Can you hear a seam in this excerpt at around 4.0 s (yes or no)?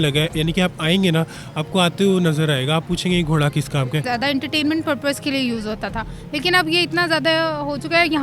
yes